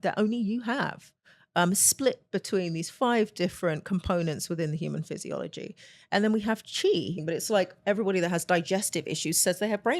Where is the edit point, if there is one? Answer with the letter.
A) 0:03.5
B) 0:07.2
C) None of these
B